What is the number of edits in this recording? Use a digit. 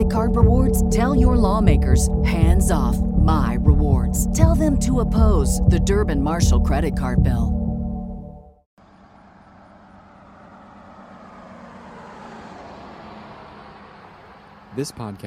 1